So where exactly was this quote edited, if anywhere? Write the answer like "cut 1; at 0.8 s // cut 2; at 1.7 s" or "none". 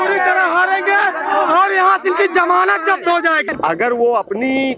cut 1; at 3.5 s

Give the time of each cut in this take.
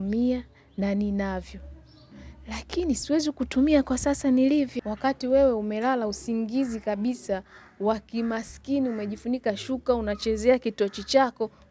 cut 1; at 4.7 s

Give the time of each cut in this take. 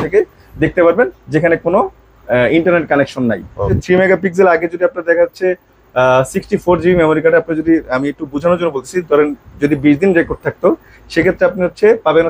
cut 1; at 3.8 s

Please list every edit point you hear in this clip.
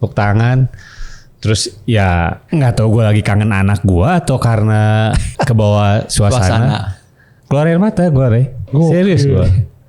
cut 1; at 2.4 s // cut 2; at 5.2 s

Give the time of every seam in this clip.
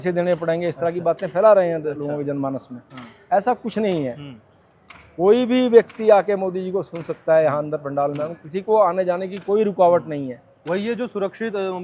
none

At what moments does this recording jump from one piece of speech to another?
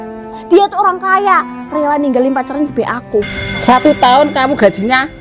cut 1; at 3.4 s

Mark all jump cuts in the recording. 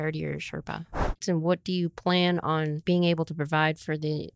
cut 1; at 1.2 s // cut 2; at 2.8 s

